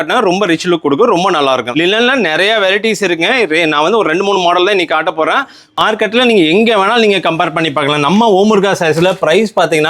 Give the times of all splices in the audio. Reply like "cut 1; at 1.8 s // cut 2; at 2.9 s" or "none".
cut 1; at 1.7 s // cut 2; at 5.8 s